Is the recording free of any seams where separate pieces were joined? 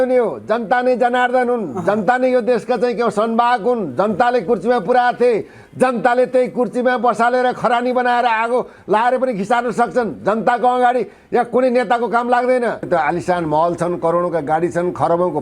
no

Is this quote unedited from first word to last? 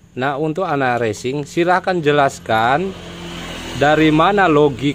yes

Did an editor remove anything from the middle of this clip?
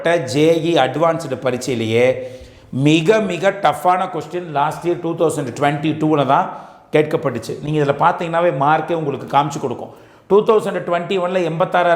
no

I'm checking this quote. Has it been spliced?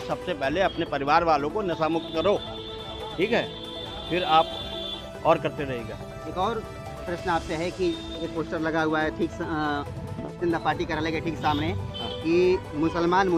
no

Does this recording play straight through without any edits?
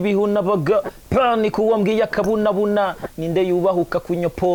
yes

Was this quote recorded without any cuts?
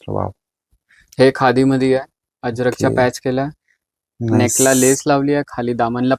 yes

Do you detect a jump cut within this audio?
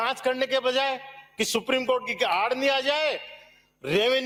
no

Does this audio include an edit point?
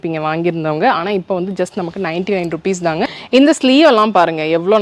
yes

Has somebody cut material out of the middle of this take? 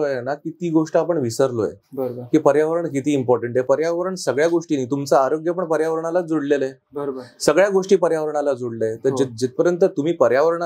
no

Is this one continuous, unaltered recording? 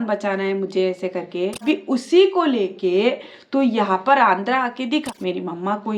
no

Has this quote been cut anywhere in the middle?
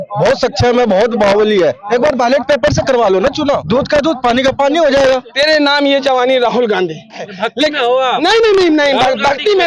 yes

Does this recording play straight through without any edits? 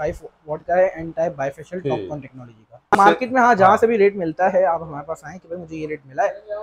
no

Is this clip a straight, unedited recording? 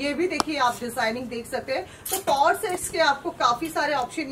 yes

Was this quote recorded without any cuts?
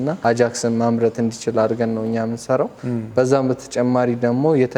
yes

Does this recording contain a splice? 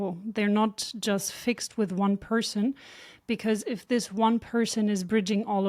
no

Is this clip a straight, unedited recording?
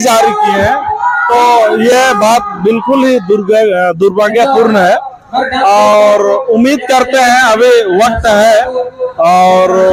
yes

